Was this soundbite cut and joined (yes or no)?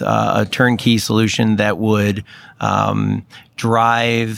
no